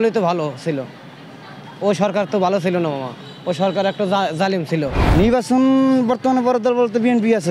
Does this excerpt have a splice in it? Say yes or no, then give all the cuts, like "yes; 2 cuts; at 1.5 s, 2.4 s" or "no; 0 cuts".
yes; 1 cut; at 5.0 s